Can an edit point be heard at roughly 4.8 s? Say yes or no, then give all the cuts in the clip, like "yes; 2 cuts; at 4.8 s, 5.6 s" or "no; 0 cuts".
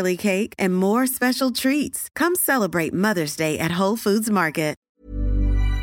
yes; 1 cut; at 4.8 s